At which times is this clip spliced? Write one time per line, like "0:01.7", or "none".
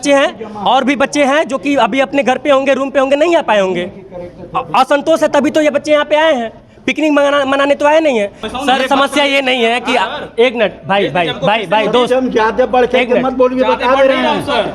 0:08.4